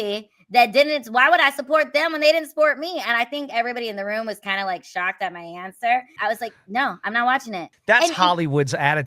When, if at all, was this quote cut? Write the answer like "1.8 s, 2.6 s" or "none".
6.1 s, 7.7 s